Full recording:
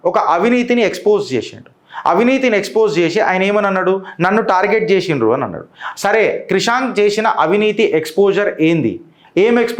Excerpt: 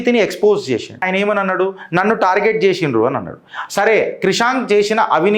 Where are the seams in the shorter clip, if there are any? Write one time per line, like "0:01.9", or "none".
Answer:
0:01.1